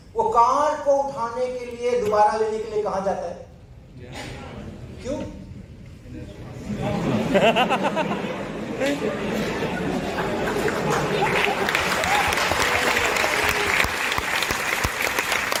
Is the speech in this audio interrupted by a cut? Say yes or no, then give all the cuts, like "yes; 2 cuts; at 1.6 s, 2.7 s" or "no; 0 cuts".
no; 0 cuts